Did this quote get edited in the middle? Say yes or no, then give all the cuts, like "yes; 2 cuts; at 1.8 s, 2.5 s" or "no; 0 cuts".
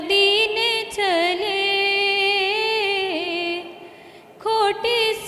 no; 0 cuts